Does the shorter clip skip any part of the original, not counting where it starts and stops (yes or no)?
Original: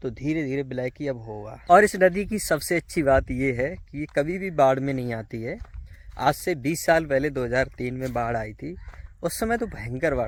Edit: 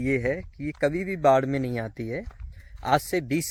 no